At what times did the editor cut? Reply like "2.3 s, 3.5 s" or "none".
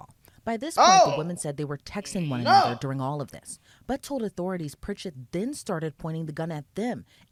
none